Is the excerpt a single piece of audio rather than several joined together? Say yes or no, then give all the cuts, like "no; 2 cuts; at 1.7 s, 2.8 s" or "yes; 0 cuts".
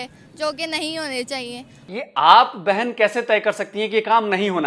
no; 1 cut; at 1.9 s